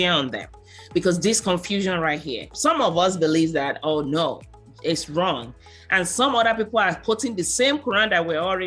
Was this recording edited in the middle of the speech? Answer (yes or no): yes